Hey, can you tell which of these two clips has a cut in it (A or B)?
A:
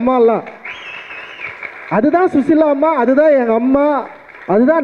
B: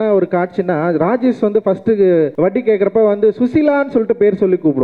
B